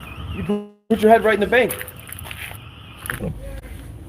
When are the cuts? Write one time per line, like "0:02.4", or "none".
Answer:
0:03.2

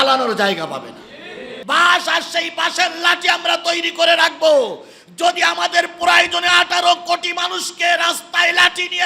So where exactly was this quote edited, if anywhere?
0:01.5

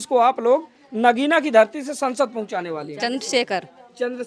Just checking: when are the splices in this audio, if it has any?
none

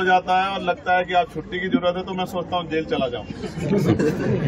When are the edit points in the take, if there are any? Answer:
none

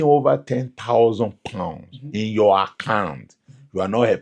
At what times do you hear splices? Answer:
none

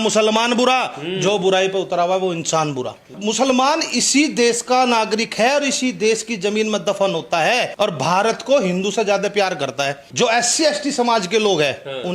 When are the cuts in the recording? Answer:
0:03.1
0:07.7
0:10.0

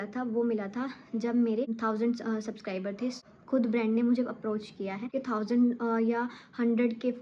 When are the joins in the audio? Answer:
0:01.8
0:03.2
0:05.1

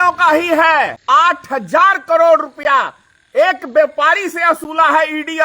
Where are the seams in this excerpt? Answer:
0:01.0

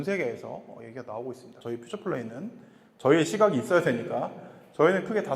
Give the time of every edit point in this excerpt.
0:01.6

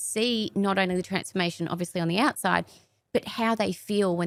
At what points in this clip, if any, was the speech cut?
none

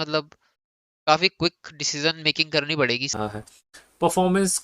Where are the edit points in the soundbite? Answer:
0:03.2

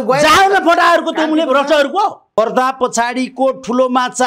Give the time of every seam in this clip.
0:02.4

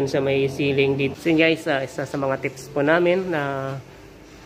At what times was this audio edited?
0:01.1

